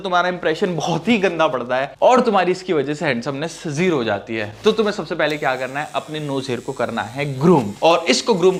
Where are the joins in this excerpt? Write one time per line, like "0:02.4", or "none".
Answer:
none